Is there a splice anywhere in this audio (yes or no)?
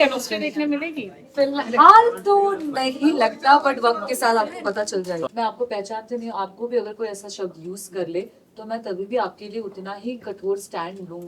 yes